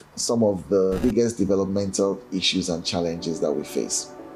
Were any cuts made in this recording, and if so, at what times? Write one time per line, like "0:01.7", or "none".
0:01.0